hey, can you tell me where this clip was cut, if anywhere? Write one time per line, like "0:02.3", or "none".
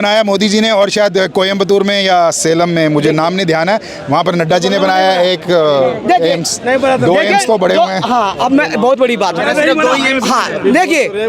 none